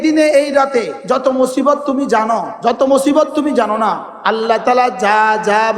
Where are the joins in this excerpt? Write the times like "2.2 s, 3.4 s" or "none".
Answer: 0.9 s, 2.5 s, 4.1 s